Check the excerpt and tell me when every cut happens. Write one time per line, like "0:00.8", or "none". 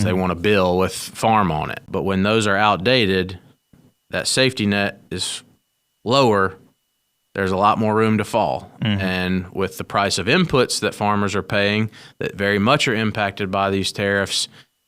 0:01.8